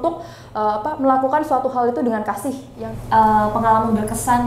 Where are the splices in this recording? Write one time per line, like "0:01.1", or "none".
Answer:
0:02.7